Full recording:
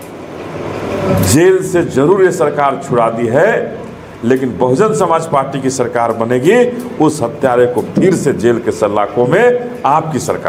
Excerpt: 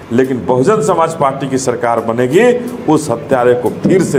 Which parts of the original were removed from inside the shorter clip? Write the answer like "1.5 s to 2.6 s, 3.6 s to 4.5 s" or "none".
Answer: none